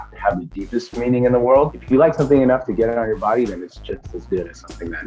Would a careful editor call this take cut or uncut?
uncut